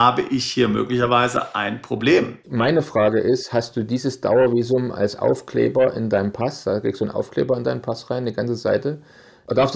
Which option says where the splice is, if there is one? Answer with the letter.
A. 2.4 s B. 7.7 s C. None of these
A